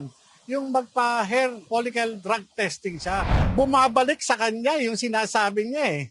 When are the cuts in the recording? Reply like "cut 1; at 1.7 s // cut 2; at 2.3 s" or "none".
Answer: cut 1; at 1.6 s // cut 2; at 3.5 s